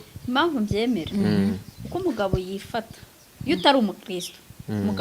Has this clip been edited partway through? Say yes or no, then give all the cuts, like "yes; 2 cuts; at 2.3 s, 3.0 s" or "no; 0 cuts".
no; 0 cuts